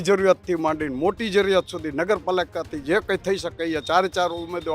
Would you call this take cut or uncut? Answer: uncut